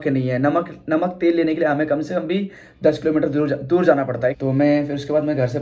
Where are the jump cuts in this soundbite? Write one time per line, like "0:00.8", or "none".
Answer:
0:04.4